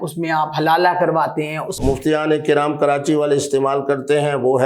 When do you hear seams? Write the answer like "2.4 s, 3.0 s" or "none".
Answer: 1.8 s